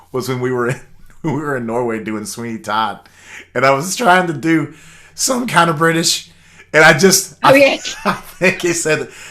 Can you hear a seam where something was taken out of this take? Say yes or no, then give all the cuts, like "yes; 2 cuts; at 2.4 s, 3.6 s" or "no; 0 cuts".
no; 0 cuts